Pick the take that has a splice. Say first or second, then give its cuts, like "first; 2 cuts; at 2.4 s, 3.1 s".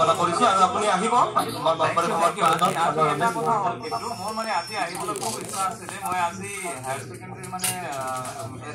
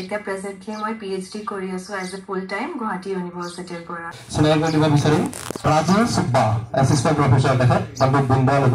second; 2 cuts; at 4.2 s, 5.7 s